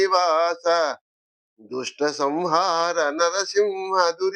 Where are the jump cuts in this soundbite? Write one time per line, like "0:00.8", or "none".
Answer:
0:00.9